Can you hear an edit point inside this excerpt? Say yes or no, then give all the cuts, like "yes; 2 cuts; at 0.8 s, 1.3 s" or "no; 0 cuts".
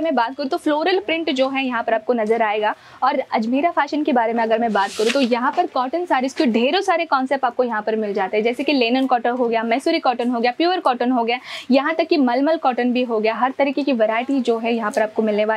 no; 0 cuts